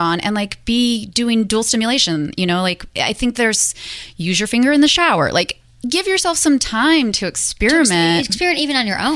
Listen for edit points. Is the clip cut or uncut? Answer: uncut